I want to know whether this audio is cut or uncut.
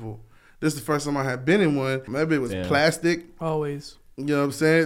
cut